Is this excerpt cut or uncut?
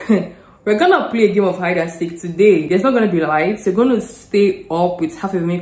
uncut